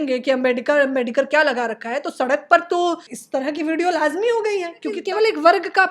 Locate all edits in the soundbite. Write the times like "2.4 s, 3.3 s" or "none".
3.1 s, 5.0 s